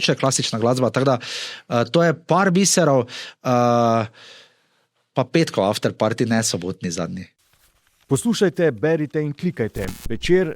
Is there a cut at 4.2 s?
no; 1 cut; at 7.3 s

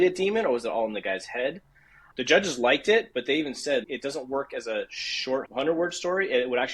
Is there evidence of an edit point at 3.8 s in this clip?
yes; 2 cuts; at 3.8 s, 5.5 s

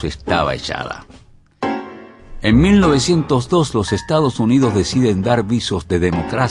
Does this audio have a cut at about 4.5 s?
no; 1 cut; at 0.9 s

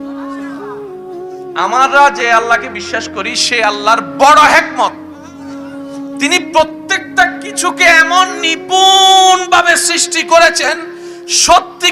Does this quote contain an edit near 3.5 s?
no; 1 cut; at 1.6 s

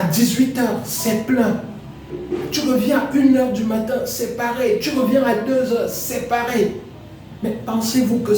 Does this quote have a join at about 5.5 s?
no; 1 cut; at 2.1 s

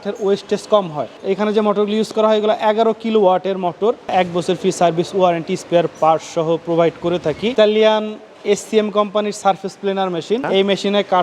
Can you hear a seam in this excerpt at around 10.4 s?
yes; 4 cuts; at 1.2 s, 4.1 s, 7.5 s, 10.4 s

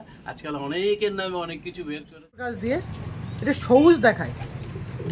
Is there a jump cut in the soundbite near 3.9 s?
no; 1 cut; at 2.6 s

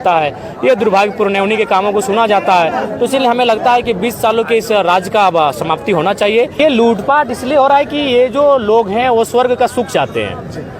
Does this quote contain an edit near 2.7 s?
no; 1 cut; at 6.5 s

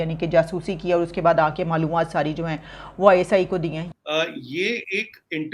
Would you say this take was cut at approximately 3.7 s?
yes; 1 cut; at 3.7 s

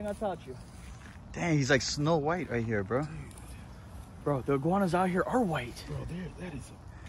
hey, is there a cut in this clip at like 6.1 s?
no; 0 cuts

